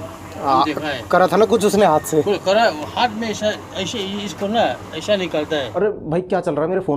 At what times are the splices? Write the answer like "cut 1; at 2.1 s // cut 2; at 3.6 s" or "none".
cut 1; at 5.7 s